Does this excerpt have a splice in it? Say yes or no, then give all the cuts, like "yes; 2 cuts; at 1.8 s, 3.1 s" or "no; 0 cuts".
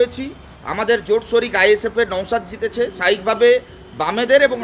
no; 0 cuts